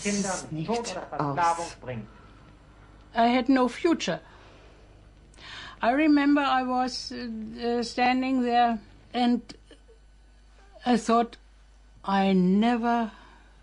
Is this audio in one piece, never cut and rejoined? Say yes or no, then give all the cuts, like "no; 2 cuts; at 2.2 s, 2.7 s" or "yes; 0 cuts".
no; 1 cut; at 5.0 s